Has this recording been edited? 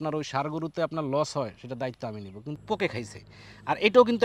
yes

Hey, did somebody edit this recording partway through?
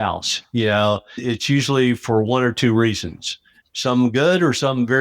yes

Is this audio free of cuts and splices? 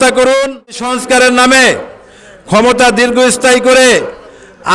no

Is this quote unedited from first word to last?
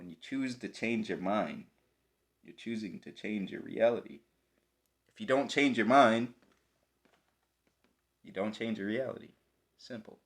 yes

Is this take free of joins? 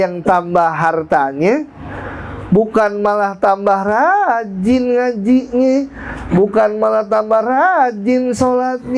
yes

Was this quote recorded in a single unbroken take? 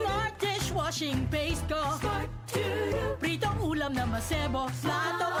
yes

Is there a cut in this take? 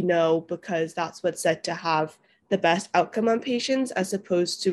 no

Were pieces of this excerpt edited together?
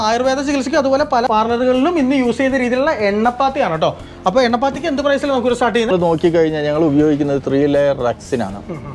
yes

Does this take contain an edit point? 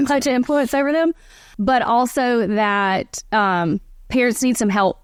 no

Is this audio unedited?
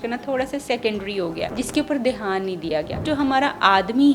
no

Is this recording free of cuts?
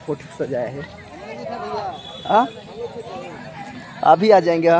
yes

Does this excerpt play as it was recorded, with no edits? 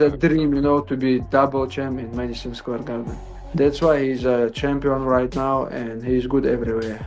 no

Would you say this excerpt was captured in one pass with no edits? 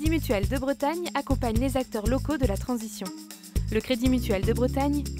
yes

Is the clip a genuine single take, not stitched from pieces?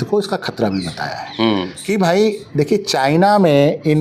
yes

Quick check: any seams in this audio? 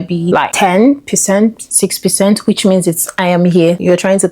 yes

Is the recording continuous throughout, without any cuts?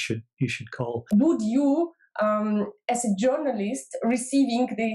no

